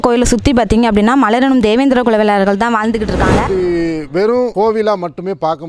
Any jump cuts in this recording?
yes; 1 cut; at 3.5 s

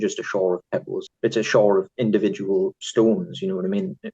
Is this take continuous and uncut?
no; 1 cut; at 1.0 s

